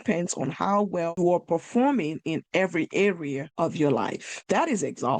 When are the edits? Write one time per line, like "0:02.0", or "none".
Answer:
0:01.2
0:03.5
0:04.3

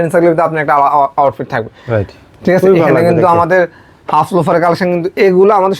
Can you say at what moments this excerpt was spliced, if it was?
none

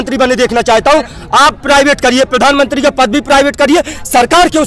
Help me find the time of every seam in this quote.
none

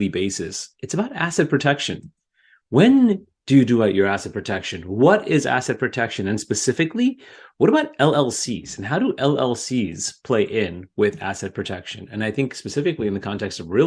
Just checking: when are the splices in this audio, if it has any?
none

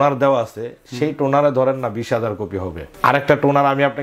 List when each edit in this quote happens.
0:02.8

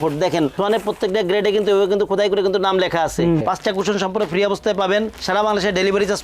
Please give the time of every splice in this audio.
0:03.4

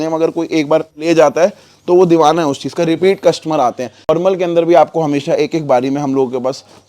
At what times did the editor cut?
0:01.0
0:04.1

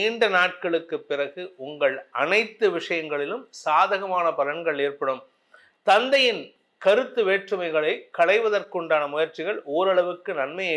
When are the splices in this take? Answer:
none

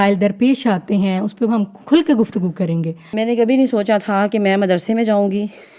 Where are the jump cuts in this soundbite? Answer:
0:03.0

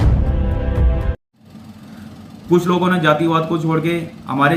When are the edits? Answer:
none

